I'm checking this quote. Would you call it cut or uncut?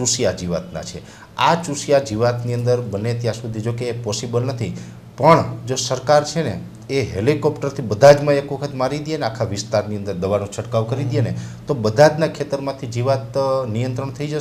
uncut